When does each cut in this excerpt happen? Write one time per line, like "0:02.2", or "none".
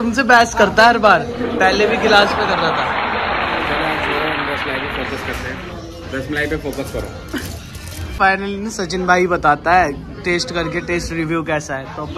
none